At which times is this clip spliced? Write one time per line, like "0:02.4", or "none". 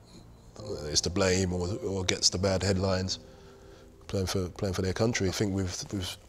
0:05.3